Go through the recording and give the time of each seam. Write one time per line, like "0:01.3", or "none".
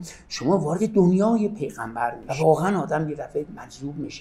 0:02.2

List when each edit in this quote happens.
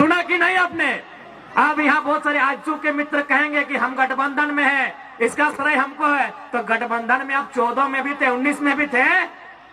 none

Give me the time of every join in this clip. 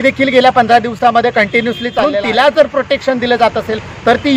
0:02.1

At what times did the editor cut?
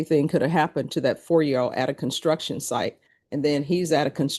none

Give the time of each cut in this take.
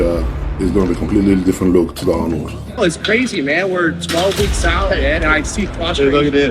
0:02.8

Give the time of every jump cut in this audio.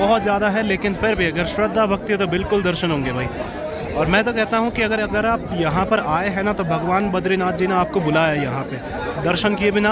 none

